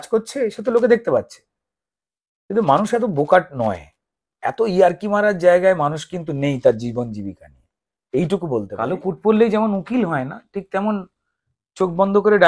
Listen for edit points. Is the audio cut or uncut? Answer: cut